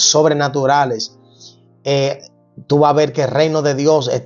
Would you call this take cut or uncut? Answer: uncut